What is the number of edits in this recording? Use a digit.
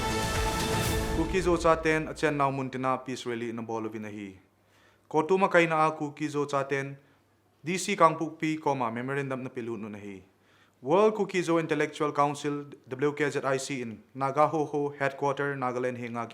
1